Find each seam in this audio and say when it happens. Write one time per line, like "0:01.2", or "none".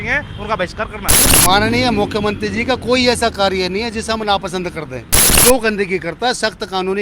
0:01.3
0:05.3